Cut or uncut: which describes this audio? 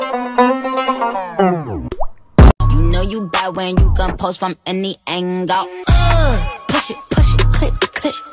cut